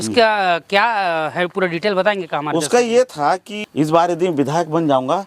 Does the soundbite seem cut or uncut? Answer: cut